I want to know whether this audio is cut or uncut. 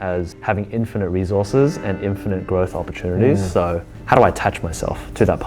cut